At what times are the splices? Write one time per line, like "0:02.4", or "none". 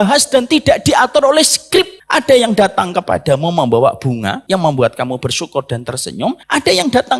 0:02.0
0:04.4
0:06.4